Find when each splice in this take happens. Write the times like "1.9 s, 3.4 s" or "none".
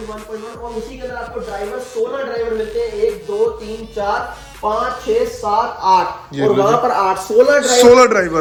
none